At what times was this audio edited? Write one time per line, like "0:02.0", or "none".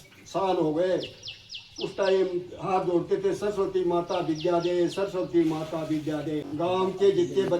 0:06.5